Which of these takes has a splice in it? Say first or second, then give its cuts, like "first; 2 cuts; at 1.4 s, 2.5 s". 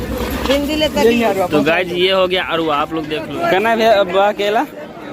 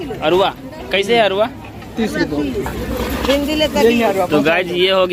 first; 1 cut; at 3.3 s